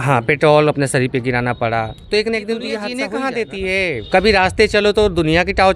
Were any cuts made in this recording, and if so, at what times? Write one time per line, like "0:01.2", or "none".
0:02.9